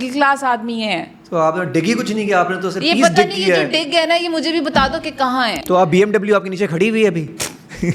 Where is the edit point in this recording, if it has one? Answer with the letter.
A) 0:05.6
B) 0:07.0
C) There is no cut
A